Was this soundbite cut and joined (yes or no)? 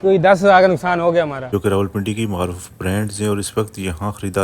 yes